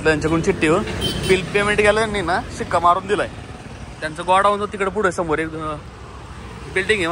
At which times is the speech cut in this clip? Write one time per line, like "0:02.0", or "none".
none